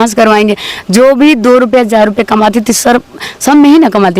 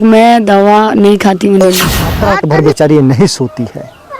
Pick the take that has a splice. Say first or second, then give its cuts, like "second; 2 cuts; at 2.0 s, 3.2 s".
second; 1 cut; at 2.2 s